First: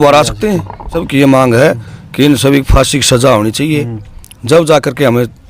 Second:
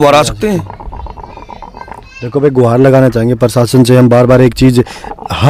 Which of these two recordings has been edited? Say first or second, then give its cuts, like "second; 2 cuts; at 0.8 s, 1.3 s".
first; 1 cut; at 1.0 s